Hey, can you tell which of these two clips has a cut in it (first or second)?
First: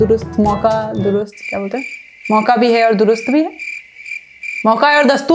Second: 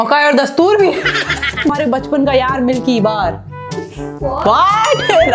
second